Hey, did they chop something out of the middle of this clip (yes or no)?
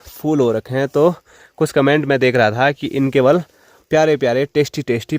no